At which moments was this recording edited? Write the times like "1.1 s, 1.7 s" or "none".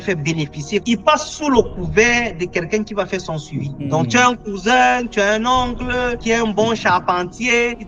none